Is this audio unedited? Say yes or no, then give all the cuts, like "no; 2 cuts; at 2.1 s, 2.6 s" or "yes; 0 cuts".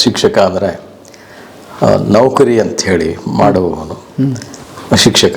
yes; 0 cuts